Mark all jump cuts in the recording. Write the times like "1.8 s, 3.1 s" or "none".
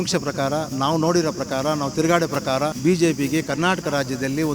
2.8 s